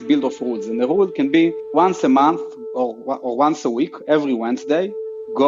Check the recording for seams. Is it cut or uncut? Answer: uncut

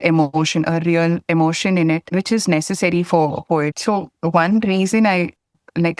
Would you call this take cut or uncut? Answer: cut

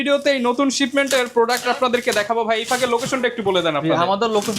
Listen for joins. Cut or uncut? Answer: uncut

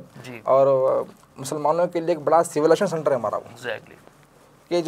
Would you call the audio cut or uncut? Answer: uncut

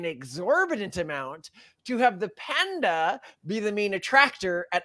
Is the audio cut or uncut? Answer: uncut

